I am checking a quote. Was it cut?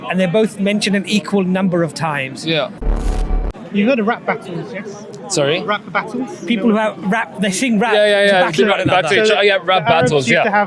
yes; 1 cut; at 3.1 s

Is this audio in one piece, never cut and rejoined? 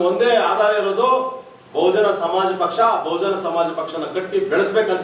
yes; 0 cuts

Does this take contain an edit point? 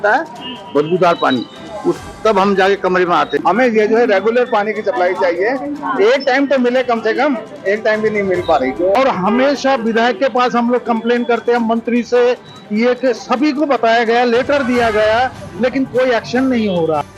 yes; 2 cuts; at 3.4 s, 8.9 s

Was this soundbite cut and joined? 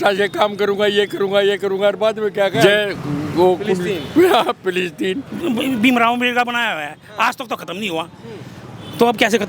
yes; 2 cuts; at 2.6 s, 5.3 s

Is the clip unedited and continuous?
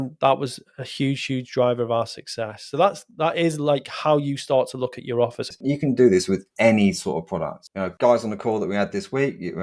no; 1 cut; at 5.5 s

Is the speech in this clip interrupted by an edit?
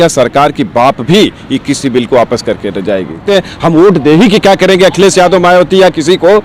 yes; 1 cut; at 3.2 s

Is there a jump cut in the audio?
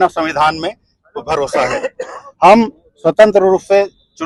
no; 0 cuts

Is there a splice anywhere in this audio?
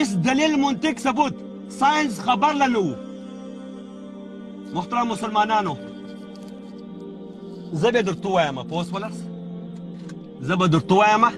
yes; 4 cuts; at 5.9 s, 7.4 s, 9.1 s, 10.4 s

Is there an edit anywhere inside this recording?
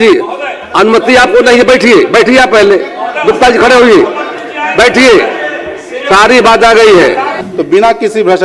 yes; 1 cut; at 7.4 s

